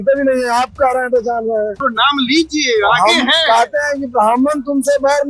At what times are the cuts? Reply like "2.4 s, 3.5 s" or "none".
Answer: 1.9 s

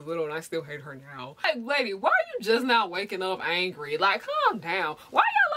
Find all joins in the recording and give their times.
1.5 s

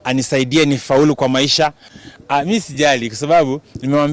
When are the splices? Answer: 1.9 s

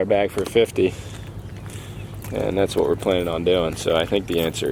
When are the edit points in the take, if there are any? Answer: none

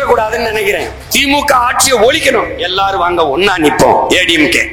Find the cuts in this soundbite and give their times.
1.2 s

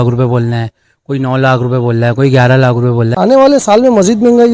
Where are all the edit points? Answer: 3.1 s

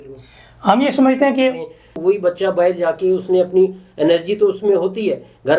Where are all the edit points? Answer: 1.9 s

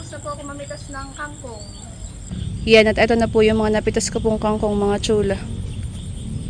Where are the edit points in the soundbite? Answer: 2.4 s

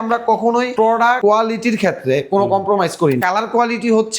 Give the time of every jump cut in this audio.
1.0 s, 3.2 s

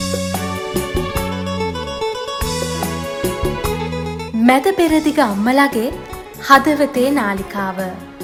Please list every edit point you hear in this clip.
none

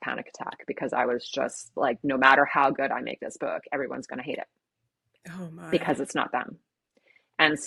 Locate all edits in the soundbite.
none

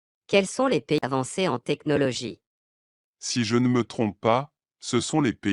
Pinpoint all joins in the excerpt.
1.0 s

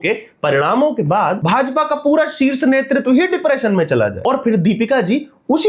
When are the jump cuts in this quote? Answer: 1.4 s, 4.2 s

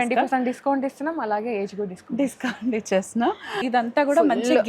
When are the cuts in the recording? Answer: 3.6 s

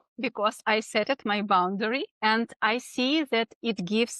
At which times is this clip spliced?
2.1 s

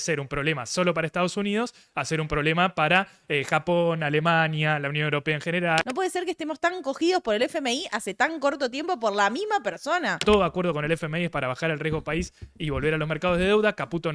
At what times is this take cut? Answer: 5.8 s, 10.2 s

